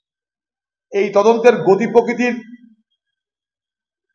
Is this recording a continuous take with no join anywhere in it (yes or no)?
yes